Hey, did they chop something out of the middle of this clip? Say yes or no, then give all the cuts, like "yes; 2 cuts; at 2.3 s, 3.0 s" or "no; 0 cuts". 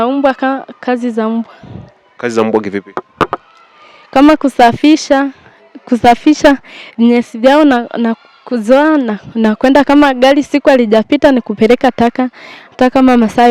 no; 0 cuts